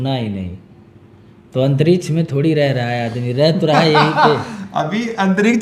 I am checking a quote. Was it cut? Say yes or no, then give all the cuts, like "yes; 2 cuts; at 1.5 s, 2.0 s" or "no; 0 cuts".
no; 0 cuts